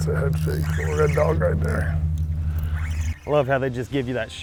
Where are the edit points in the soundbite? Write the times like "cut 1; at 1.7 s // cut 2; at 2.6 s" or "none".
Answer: none